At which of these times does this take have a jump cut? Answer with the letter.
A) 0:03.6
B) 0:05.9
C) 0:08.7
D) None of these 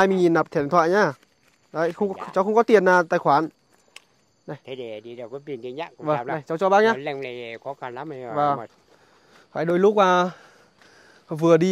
C